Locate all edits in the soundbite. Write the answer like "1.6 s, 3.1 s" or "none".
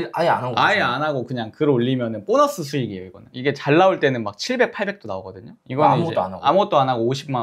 none